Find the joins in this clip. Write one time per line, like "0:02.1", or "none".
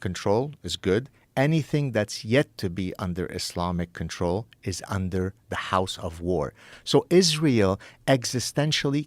0:06.7